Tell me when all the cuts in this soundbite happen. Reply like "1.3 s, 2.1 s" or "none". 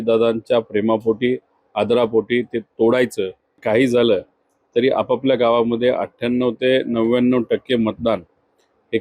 3.6 s